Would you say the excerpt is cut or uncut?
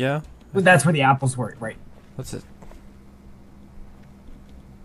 cut